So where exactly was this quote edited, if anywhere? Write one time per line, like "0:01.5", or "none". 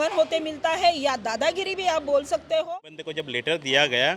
0:02.7